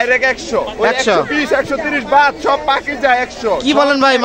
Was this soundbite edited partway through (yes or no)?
no